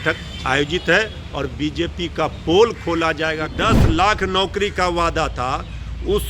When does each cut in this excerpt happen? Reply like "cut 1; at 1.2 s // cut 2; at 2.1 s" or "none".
cut 1; at 3.5 s

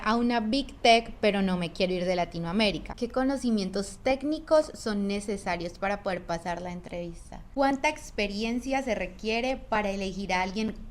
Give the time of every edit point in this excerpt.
cut 1; at 2.9 s // cut 2; at 7.4 s

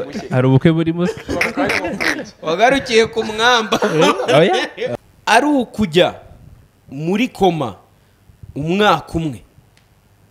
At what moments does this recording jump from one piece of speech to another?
cut 1; at 4.8 s

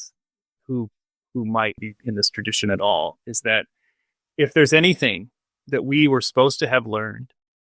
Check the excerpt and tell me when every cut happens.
cut 1; at 1.8 s

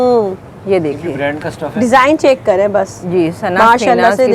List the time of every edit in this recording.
none

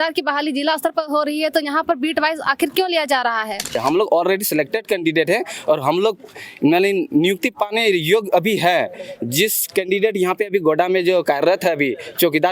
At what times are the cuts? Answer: cut 1; at 3.8 s

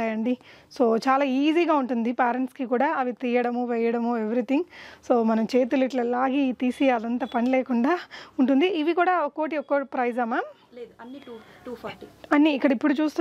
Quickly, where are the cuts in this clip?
none

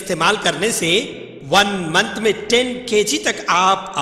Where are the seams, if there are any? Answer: none

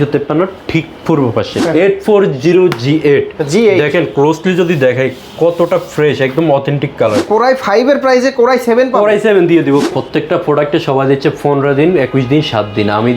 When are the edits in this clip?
cut 1; at 1.6 s // cut 2; at 7.2 s // cut 3; at 9.9 s

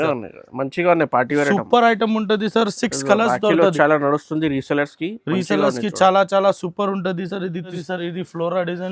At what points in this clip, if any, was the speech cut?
cut 1; at 7.8 s

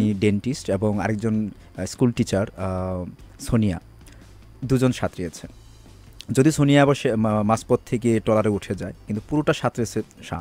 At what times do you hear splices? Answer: none

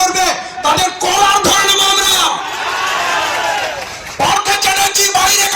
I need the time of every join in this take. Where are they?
none

